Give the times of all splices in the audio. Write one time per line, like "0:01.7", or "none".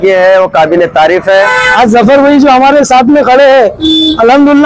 0:01.7